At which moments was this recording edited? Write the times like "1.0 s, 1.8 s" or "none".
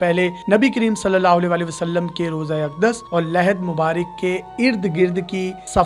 none